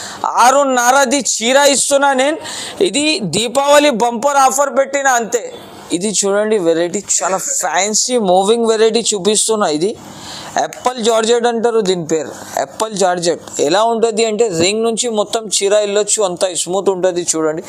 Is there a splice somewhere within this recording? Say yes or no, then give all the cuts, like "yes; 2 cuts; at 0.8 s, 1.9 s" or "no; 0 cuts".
no; 0 cuts